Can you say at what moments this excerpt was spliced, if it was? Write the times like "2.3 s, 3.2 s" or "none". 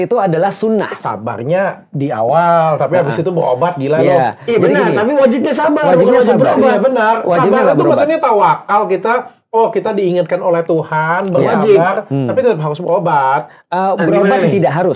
none